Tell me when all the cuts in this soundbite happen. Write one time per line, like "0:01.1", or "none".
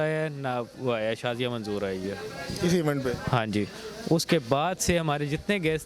none